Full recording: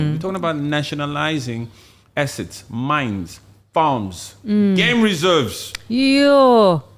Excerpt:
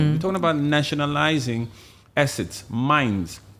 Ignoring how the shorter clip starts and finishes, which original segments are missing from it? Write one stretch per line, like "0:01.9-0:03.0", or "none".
none